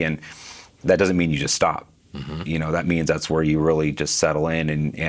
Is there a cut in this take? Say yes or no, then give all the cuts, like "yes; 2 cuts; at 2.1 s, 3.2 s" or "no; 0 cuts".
no; 0 cuts